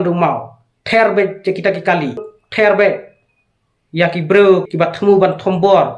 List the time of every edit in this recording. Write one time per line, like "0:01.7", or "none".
0:02.4
0:04.7